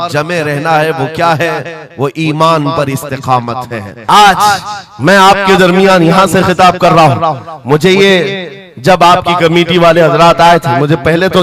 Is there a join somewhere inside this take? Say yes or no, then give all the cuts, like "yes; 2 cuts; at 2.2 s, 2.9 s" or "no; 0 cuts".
yes; 1 cut; at 3.9 s